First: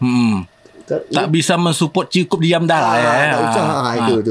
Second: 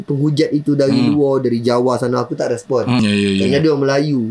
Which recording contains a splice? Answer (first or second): second